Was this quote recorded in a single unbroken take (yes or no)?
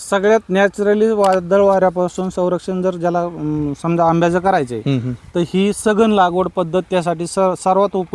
yes